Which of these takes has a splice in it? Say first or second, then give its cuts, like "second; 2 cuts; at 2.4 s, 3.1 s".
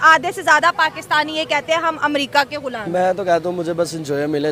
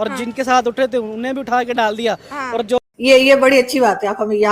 second; 1 cut; at 2.8 s